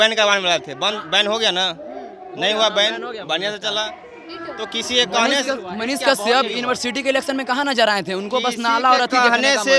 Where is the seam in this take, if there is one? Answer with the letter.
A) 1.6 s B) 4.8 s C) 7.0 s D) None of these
D